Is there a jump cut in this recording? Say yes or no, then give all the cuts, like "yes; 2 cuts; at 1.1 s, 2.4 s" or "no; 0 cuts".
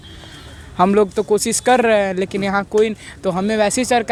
no; 0 cuts